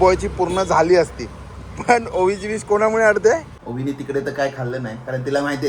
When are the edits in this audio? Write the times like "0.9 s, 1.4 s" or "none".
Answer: 3.6 s

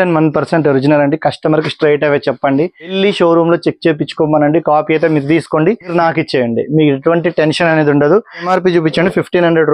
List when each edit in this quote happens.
2.9 s, 5.9 s, 8.5 s

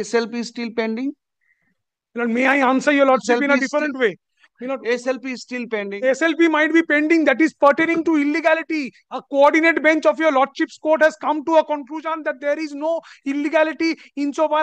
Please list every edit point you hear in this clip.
none

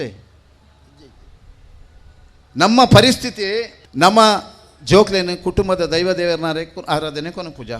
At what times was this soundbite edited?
3.8 s

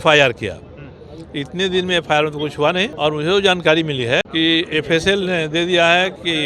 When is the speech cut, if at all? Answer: 2.9 s, 4.3 s

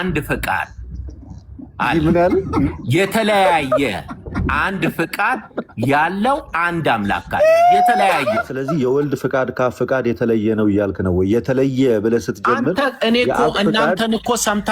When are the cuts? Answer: 8.5 s

